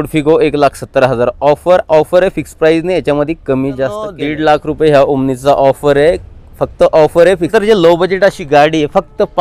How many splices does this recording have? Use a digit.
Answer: 2